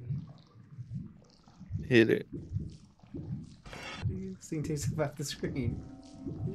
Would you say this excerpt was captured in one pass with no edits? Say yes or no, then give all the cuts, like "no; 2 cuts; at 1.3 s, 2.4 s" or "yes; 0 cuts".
no; 1 cut; at 4.0 s